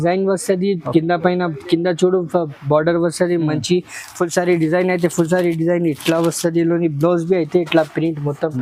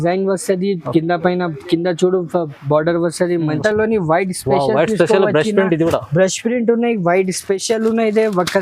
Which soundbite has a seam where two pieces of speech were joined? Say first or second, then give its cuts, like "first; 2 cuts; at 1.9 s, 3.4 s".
second; 1 cut; at 3.6 s